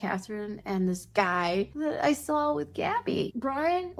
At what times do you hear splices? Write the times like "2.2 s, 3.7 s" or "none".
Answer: none